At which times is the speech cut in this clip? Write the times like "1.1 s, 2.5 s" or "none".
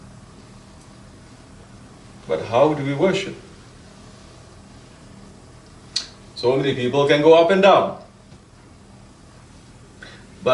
7.2 s